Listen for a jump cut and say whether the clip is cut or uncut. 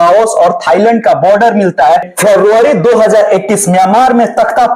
cut